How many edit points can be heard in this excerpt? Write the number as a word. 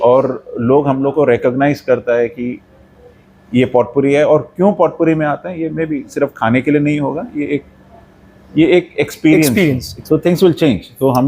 one